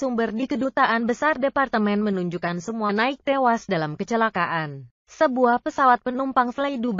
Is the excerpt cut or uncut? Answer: cut